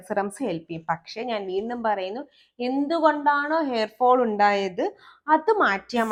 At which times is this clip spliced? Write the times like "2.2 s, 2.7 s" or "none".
none

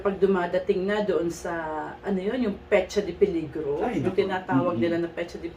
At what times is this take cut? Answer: none

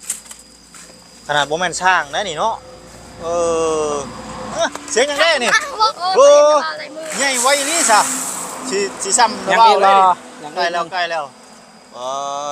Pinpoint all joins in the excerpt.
4.5 s, 5.9 s

